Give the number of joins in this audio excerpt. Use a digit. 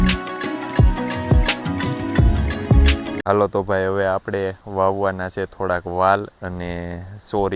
1